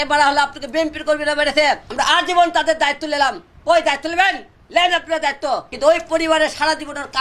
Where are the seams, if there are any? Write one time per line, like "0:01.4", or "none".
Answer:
0:05.7